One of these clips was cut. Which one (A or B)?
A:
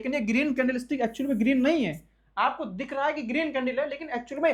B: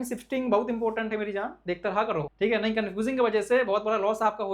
B